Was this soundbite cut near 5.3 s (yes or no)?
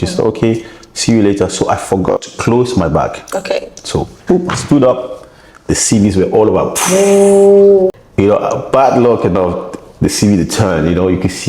no